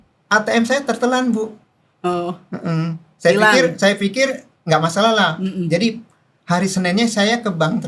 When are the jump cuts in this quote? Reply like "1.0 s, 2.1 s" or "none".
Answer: none